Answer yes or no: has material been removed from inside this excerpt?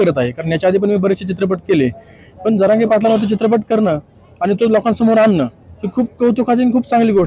no